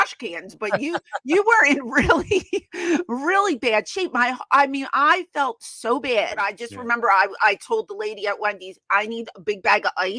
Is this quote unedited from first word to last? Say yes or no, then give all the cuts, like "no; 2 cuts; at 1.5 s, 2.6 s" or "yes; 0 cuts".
no; 1 cut; at 6.6 s